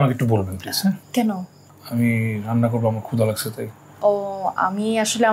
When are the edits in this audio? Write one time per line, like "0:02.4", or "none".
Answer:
0:01.0

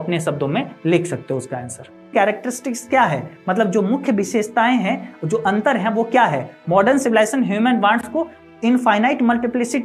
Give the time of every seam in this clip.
0:02.1
0:08.1

